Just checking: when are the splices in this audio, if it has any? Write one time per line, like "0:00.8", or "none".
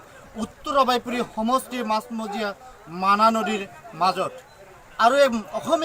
0:02.2